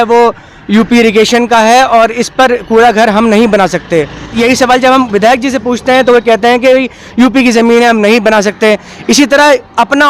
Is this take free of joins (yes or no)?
no